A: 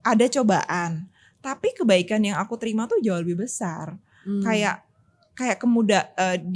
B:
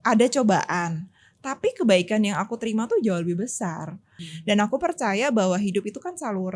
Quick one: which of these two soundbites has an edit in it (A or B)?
B